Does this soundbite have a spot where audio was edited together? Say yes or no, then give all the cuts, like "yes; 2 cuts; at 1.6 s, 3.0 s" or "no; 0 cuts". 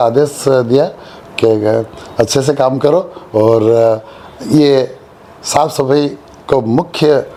no; 0 cuts